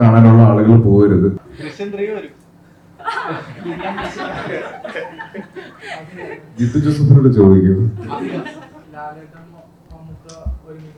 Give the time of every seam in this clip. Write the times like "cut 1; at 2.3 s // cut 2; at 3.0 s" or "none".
cut 1; at 1.4 s // cut 2; at 8.8 s